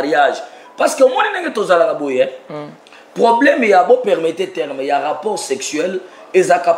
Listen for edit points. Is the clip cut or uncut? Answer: uncut